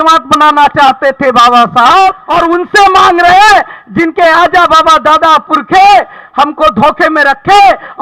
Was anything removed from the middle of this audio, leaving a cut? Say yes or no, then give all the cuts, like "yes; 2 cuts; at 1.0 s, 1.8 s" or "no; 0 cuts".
yes; 1 cut; at 2.2 s